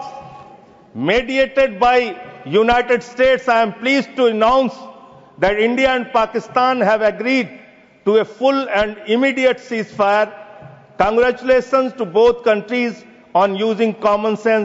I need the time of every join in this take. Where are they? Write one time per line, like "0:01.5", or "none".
none